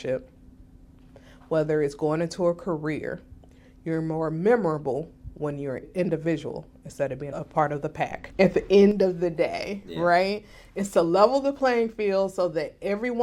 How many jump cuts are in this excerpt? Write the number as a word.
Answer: three